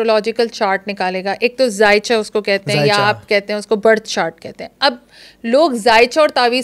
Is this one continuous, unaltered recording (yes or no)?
yes